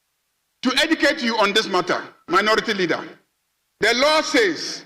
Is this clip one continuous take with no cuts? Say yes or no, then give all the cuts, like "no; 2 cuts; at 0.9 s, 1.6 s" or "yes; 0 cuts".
yes; 0 cuts